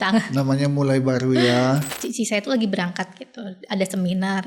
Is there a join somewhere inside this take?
yes; 1 cut; at 1.9 s

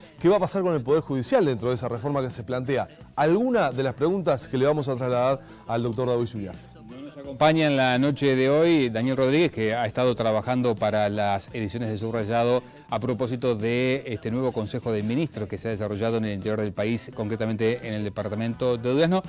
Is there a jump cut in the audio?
no; 0 cuts

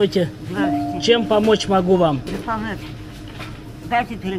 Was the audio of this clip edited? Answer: no; 0 cuts

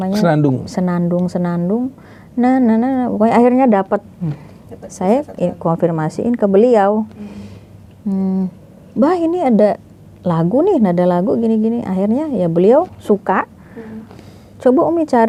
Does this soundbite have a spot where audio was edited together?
no; 0 cuts

